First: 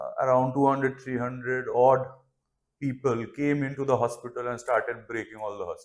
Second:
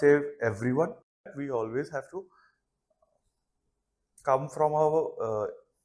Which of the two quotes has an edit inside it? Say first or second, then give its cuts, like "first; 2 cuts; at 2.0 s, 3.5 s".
second; 1 cut; at 1.3 s